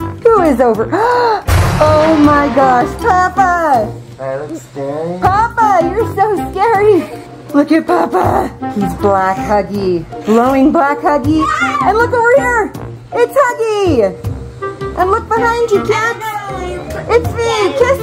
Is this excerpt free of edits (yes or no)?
yes